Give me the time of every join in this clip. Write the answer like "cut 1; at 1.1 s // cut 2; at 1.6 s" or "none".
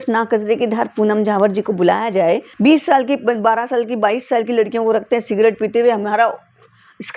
cut 1; at 2.5 s